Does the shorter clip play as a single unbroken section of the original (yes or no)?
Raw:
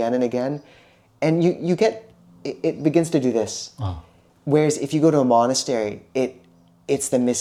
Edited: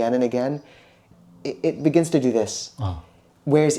no